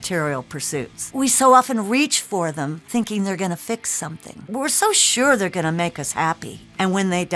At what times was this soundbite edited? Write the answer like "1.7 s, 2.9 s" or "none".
1.0 s, 4.5 s